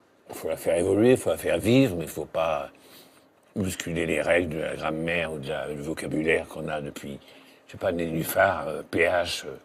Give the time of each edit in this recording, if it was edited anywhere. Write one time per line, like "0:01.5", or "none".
0:06.3